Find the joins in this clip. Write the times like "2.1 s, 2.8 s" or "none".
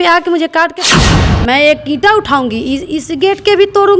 1.1 s

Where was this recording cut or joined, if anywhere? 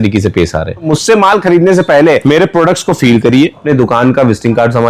0.9 s, 2.2 s, 3.6 s

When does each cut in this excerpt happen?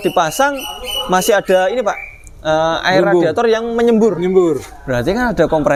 none

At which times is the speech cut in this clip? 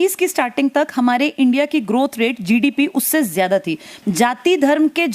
3.9 s

